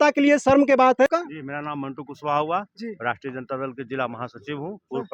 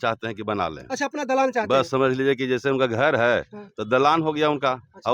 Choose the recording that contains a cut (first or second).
first